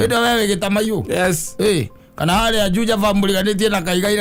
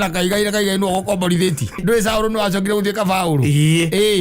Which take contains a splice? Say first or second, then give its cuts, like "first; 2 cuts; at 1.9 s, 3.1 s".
second; 1 cut; at 1.8 s